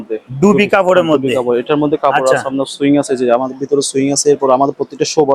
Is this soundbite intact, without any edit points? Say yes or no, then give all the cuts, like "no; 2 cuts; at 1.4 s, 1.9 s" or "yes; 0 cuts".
yes; 0 cuts